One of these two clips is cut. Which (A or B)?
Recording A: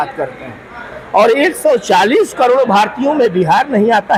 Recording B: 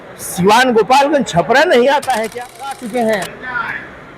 B